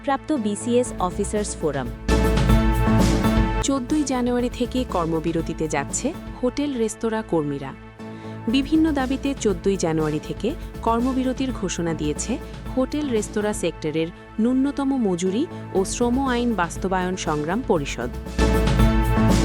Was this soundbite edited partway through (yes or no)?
yes